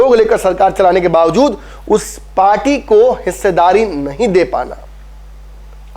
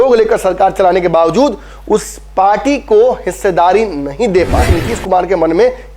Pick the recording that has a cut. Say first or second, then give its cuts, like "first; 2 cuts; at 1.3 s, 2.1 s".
second; 1 cut; at 4.7 s